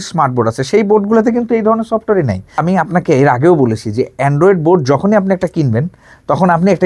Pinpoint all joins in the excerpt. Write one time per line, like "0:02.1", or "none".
0:02.6

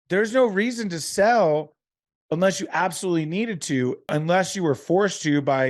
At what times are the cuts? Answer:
0:04.1

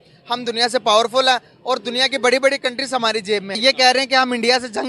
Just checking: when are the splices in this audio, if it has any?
0:03.5

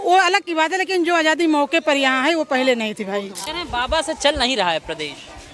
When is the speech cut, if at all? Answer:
0:03.4

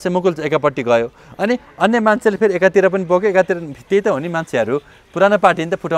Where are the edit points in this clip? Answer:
none

